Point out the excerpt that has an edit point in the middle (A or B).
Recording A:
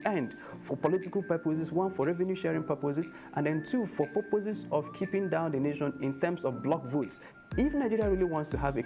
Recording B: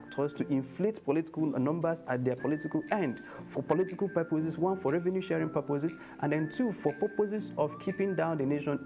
A